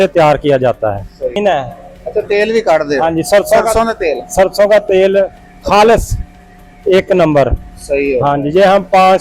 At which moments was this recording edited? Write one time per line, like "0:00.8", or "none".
0:01.4